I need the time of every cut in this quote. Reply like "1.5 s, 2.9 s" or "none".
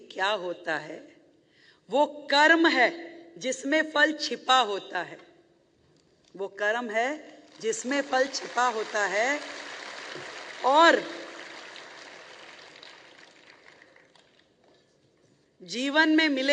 none